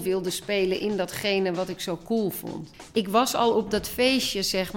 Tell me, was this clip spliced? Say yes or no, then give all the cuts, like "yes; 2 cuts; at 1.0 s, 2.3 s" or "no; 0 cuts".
yes; 1 cut; at 2.9 s